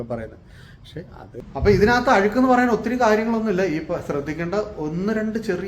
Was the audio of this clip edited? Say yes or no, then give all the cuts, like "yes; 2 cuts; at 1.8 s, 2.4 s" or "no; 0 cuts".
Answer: yes; 1 cut; at 1.3 s